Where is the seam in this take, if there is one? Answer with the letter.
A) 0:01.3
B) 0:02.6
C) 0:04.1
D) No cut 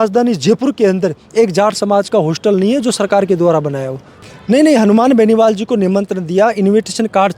C